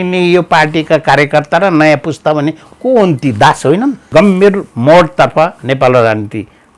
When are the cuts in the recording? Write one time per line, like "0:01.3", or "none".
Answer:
0:04.1